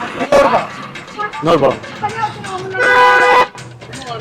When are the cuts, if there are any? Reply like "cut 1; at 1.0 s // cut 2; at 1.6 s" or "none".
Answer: cut 1; at 2.0 s